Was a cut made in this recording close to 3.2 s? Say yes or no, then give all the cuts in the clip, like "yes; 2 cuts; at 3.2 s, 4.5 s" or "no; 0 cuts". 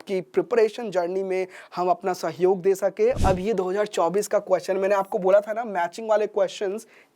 yes; 1 cut; at 3.2 s